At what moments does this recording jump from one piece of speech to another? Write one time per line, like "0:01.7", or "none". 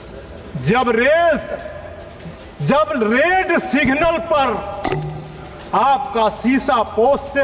none